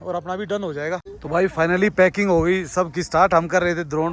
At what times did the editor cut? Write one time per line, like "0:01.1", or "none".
0:01.3